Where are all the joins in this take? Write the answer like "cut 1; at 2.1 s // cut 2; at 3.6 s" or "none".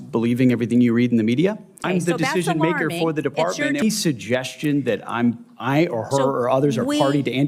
cut 1; at 1.8 s // cut 2; at 3.8 s